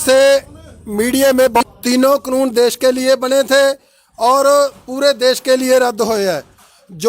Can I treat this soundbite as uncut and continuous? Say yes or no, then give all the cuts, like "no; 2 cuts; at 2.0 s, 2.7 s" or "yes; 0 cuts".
no; 1 cut; at 1.6 s